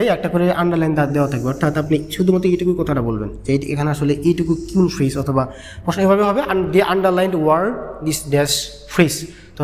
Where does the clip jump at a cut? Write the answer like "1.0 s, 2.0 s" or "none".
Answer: none